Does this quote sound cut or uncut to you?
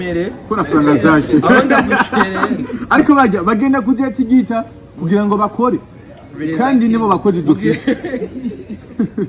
uncut